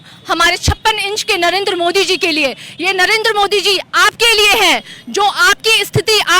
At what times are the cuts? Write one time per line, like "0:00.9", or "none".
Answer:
none